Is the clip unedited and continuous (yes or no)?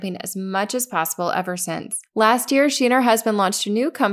no